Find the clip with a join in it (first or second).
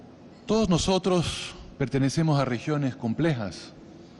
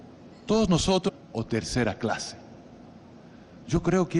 first